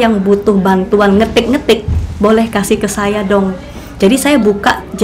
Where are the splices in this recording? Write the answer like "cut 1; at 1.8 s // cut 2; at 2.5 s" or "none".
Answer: none